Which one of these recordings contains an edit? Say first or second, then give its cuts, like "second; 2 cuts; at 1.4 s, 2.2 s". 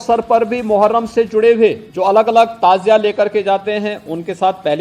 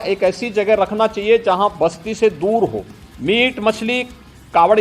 first; 1 cut; at 1.9 s